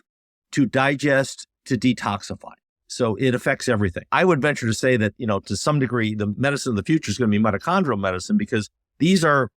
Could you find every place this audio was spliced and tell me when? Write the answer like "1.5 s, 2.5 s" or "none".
4.1 s